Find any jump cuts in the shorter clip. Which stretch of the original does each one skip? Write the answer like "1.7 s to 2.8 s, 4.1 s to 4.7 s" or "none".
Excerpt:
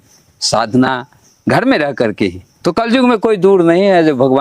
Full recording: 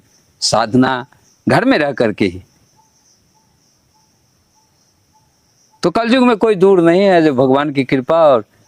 2.5 s to 5.6 s